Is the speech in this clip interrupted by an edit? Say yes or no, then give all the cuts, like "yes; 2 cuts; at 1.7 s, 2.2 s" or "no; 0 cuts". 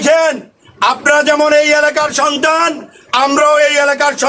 no; 0 cuts